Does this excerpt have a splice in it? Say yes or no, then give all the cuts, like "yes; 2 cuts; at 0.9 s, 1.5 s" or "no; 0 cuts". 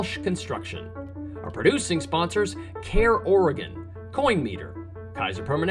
yes; 1 cut; at 1.0 s